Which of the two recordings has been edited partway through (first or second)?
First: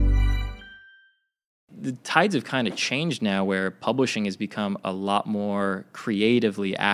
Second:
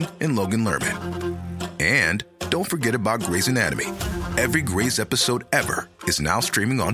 first